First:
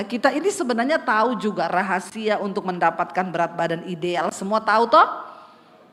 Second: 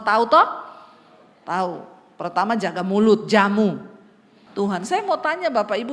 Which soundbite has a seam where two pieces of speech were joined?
second; 1 cut; at 4.9 s

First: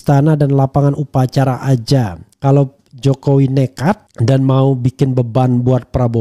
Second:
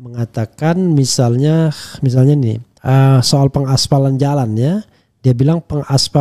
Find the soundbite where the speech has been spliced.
first; 1 cut; at 2.2 s

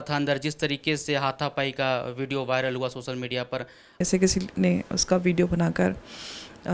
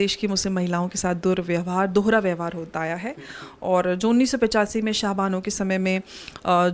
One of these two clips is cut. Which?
first; 1 cut; at 4.0 s

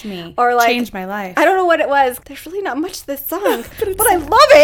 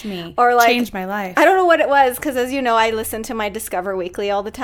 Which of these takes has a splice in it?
first; 1 cut; at 2.2 s

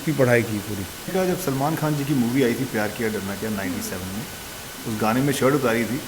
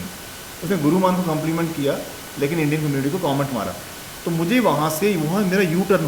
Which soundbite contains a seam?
first; 1 cut; at 1.1 s

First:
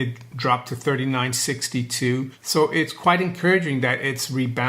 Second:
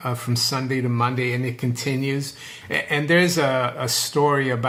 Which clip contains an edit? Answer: first; 1 cut; at 2.4 s

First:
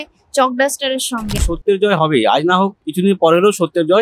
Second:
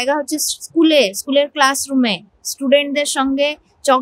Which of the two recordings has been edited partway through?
first; 2 cuts; at 1.5 s, 2.8 s

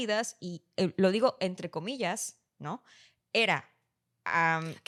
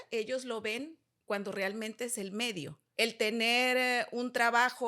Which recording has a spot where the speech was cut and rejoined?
second; 1 cut; at 2.8 s

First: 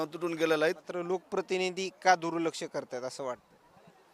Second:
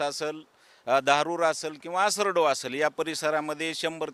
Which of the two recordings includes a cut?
first; 1 cut; at 0.9 s

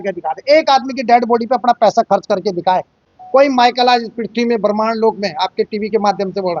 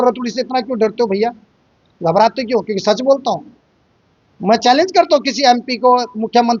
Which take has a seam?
first; 1 cut; at 3.0 s

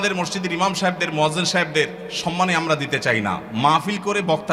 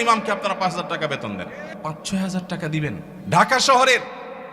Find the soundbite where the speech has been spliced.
second; 2 cuts; at 1.7 s, 3.1 s

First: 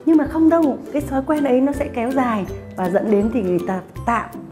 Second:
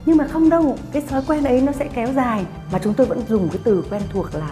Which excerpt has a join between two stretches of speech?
second; 1 cut; at 2.6 s

